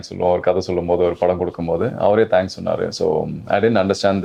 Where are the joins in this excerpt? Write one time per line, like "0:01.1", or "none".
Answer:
none